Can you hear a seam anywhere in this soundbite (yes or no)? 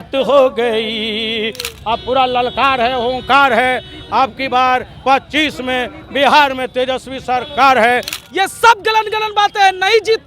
yes